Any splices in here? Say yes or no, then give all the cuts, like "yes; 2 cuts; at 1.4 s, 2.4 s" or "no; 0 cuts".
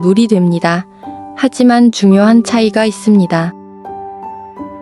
yes; 1 cut; at 3.5 s